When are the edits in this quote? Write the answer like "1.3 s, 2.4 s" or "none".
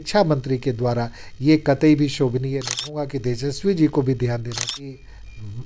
3.0 s, 4.6 s